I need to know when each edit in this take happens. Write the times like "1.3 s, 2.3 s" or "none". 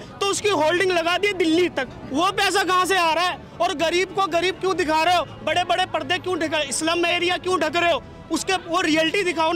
none